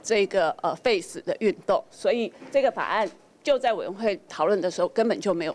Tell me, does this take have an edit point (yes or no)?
no